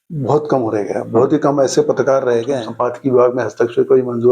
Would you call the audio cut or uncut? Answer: cut